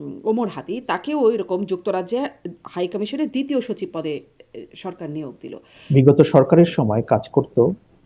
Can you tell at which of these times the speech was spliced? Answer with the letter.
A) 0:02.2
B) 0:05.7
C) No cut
B